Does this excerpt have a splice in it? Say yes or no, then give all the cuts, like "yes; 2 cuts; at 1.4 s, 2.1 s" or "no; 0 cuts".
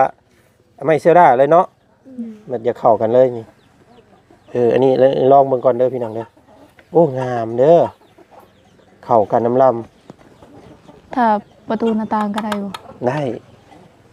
no; 0 cuts